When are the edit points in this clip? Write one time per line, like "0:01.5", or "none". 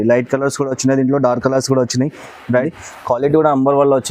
0:02.7